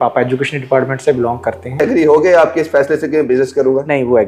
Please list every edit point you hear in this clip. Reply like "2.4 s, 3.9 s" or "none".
1.8 s